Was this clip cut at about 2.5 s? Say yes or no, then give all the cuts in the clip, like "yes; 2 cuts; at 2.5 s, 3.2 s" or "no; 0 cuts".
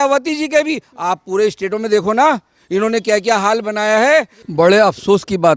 no; 1 cut; at 4.4 s